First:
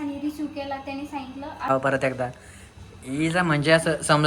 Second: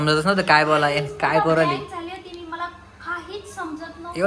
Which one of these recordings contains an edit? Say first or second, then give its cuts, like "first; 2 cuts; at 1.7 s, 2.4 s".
first; 1 cut; at 1.7 s